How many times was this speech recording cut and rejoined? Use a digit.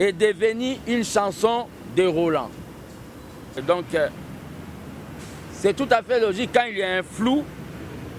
1